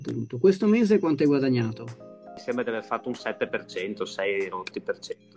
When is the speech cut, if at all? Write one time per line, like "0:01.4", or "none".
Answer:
0:02.4

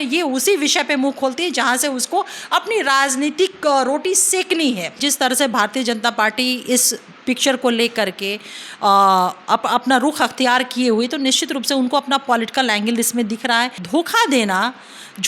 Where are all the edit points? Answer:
0:04.9
0:13.8

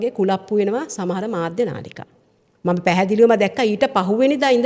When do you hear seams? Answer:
none

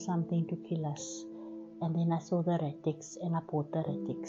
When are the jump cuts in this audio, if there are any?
none

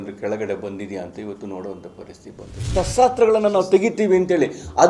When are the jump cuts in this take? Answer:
0:02.7

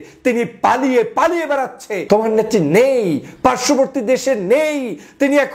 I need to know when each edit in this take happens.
0:01.9

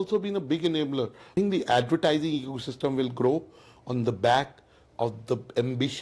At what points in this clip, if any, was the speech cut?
0:01.3

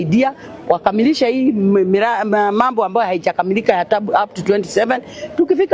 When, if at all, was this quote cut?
none

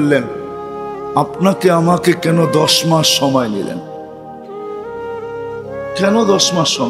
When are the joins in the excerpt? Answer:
0:04.2
0:06.0

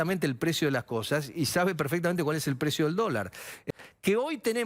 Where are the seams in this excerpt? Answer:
0:03.5

